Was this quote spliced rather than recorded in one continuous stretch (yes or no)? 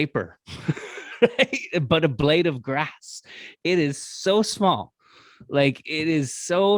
no